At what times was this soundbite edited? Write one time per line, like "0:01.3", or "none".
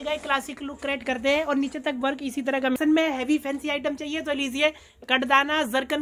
0:02.8